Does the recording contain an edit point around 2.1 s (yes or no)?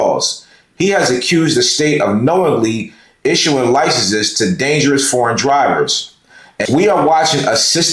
no